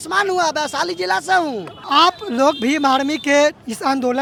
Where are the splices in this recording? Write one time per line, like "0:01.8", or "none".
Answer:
none